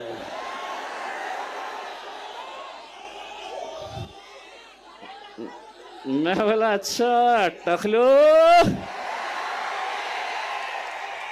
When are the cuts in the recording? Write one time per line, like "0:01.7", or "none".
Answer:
none

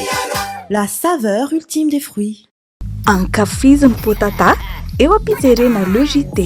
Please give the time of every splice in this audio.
0:02.4

